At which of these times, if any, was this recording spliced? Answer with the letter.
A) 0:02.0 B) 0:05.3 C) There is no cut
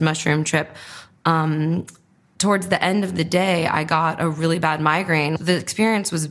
B